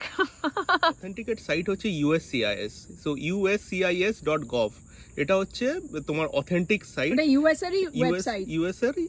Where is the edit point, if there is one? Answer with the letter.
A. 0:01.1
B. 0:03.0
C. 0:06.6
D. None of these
A